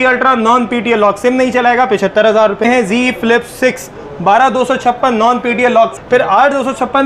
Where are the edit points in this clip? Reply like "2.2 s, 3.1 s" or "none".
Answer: 2.6 s, 5.9 s